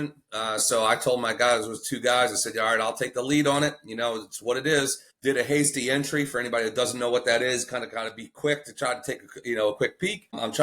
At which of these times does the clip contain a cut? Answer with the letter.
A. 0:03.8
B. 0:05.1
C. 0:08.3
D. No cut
B